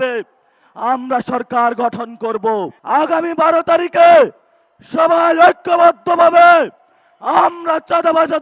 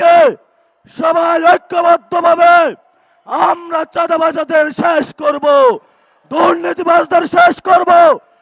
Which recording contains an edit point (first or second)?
first